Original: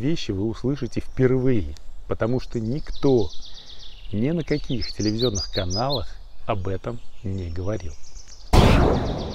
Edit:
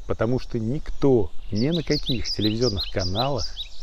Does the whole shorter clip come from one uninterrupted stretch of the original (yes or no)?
no